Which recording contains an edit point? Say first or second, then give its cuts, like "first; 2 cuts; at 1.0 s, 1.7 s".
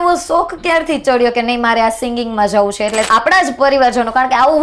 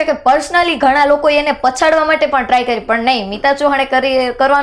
first; 1 cut; at 3.1 s